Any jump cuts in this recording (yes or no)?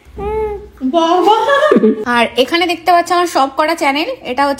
yes